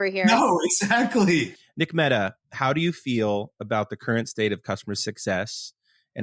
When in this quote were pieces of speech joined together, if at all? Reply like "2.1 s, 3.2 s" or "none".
1.6 s